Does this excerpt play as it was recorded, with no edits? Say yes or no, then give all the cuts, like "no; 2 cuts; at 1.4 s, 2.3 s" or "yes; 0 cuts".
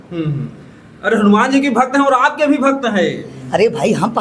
yes; 0 cuts